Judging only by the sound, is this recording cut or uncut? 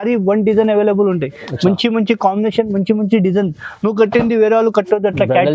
uncut